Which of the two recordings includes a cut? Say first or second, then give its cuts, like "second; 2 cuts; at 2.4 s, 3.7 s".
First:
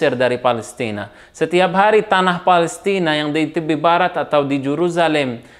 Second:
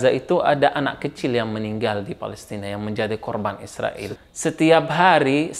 second; 1 cut; at 4.0 s